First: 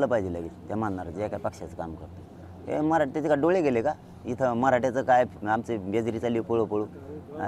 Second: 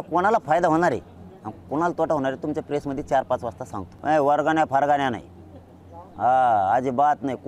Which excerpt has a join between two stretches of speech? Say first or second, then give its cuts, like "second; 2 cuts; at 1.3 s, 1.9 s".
second; 1 cut; at 3.9 s